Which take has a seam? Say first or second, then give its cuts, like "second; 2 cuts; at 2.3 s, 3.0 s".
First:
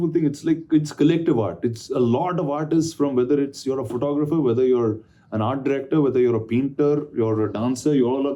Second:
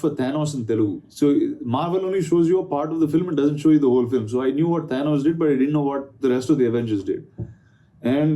second; 1 cut; at 1.0 s